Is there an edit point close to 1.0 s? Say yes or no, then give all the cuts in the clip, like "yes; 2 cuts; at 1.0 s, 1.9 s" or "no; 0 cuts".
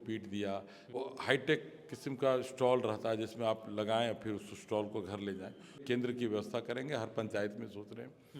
yes; 2 cuts; at 1.0 s, 5.8 s